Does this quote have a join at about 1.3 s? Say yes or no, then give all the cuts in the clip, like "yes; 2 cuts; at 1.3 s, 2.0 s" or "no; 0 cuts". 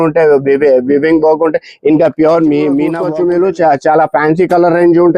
no; 1 cut; at 3.0 s